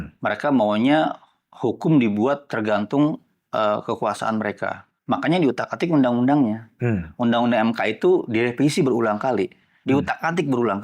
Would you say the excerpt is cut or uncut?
uncut